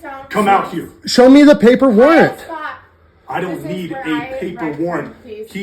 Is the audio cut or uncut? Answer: uncut